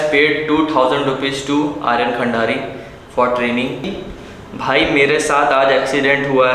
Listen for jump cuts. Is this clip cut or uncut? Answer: cut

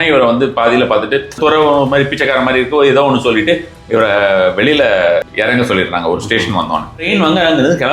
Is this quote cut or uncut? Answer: cut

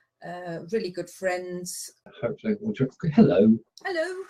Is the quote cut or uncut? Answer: uncut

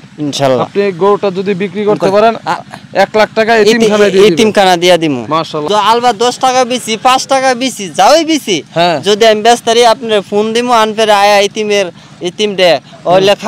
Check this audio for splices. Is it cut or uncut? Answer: cut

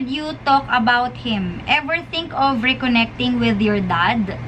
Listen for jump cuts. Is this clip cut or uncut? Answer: uncut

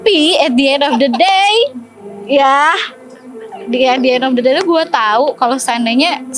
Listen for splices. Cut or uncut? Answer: uncut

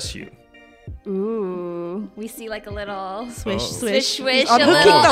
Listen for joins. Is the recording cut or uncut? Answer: uncut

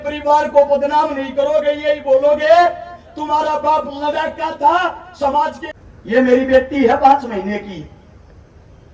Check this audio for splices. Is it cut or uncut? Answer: cut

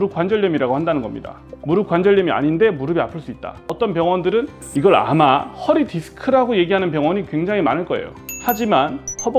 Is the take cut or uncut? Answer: cut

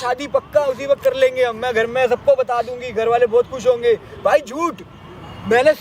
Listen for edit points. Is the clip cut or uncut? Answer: uncut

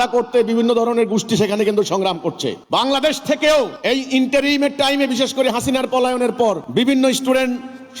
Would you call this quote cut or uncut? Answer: cut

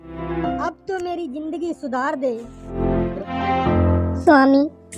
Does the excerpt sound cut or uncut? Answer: cut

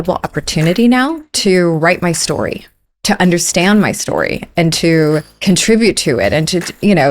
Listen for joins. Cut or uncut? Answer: cut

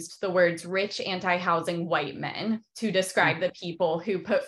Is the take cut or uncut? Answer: uncut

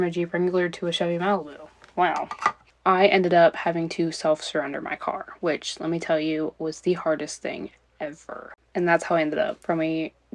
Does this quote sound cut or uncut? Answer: cut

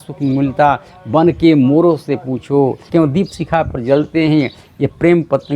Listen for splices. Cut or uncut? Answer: cut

